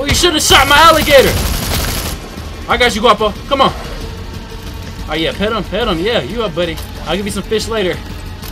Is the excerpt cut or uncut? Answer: uncut